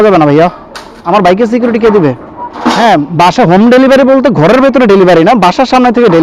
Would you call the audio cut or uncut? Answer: cut